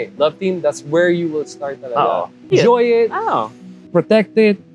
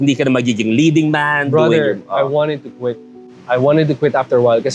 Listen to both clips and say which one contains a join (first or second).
first